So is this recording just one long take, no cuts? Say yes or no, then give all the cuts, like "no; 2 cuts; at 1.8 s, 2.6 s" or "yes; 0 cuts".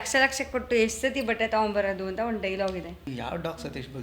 no; 1 cut; at 3.0 s